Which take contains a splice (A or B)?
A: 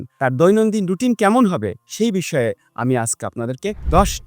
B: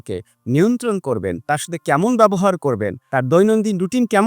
B